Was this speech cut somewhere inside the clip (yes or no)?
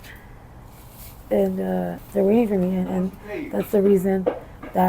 yes